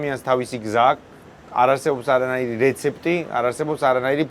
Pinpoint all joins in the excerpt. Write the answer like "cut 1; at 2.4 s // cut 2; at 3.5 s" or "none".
none